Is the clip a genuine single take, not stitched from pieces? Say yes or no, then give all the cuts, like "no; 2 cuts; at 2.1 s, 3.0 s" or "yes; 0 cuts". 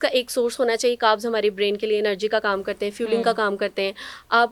yes; 0 cuts